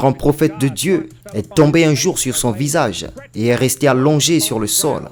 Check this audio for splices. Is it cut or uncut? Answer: uncut